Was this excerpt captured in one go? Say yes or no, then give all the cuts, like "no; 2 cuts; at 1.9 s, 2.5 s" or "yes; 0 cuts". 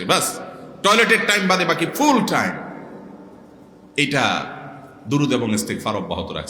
yes; 0 cuts